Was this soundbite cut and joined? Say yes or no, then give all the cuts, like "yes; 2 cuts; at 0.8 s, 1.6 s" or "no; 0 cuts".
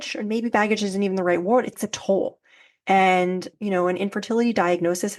yes; 2 cuts; at 1.7 s, 3.5 s